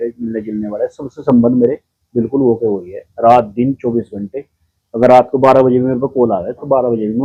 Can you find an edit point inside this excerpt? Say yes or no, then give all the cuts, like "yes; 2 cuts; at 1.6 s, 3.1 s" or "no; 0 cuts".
no; 0 cuts